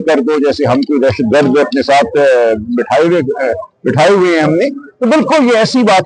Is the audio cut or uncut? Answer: uncut